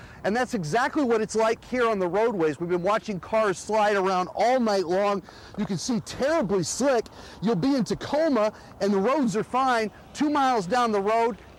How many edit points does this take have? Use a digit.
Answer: 0